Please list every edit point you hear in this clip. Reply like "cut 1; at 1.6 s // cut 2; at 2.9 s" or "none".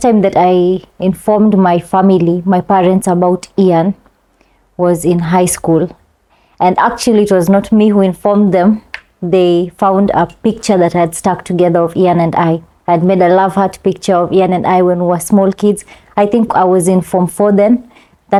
none